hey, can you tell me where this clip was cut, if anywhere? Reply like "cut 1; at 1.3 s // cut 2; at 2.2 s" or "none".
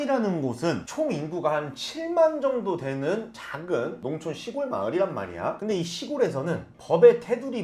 none